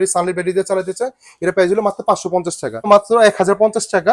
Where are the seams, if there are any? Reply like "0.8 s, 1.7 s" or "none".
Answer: 2.9 s

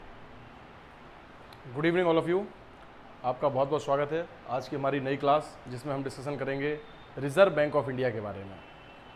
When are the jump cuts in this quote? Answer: 0.9 s

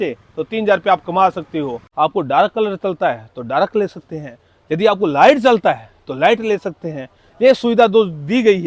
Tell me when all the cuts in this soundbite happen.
1.8 s

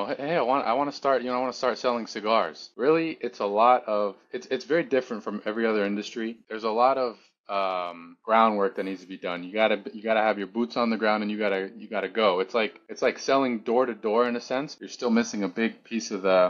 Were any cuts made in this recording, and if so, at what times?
2.6 s, 6.4 s, 14.8 s

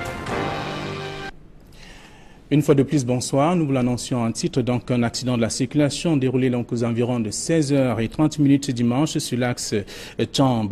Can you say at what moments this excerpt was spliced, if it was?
none

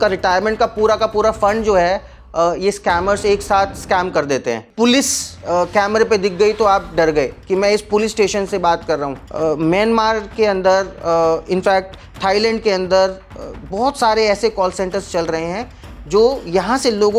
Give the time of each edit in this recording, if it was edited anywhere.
4.7 s, 9.2 s

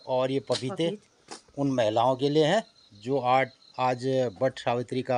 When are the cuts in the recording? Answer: none

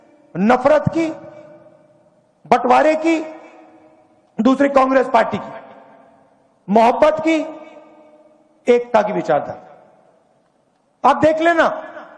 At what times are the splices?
2.7 s

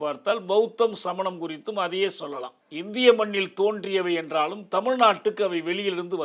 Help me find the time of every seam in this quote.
2.6 s

